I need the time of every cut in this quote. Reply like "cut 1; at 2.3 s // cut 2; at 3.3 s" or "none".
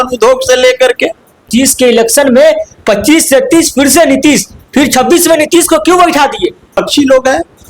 cut 1; at 1.5 s // cut 2; at 6.8 s